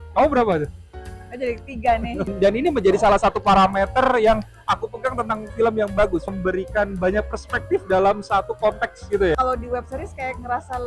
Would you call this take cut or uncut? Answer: cut